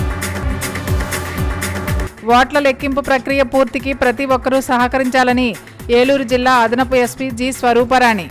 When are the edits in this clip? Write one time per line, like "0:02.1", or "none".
0:02.0